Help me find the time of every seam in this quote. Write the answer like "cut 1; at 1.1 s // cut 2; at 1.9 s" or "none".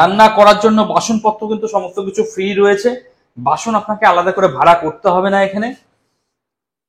none

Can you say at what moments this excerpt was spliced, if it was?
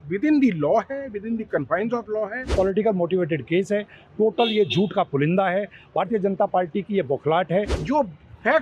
cut 1; at 2.5 s // cut 2; at 7.8 s

